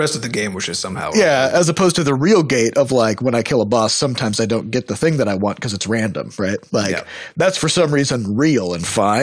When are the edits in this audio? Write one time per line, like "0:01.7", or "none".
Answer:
0:01.0